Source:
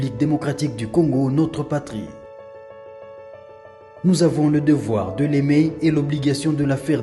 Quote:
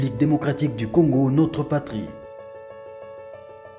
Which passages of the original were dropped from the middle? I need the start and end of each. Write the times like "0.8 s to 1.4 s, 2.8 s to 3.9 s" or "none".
none